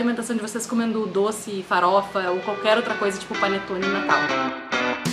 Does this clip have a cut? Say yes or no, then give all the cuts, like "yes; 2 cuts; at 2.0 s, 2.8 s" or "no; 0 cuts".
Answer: yes; 1 cut; at 4.1 s